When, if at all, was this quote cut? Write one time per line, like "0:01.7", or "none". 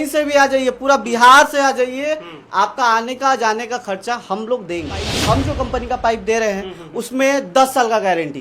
0:05.3